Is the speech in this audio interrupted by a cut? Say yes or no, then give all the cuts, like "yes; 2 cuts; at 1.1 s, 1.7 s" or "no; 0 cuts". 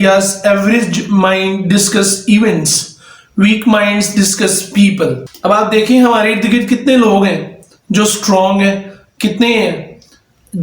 no; 0 cuts